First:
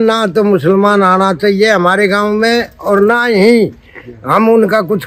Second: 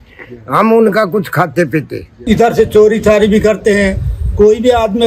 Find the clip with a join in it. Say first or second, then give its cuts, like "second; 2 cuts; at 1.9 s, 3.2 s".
second; 1 cut; at 2.2 s